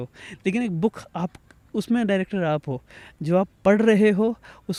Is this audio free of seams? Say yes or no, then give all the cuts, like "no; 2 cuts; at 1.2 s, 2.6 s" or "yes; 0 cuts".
yes; 0 cuts